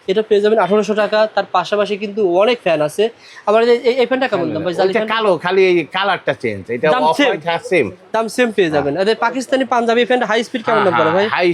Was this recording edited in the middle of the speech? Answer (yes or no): no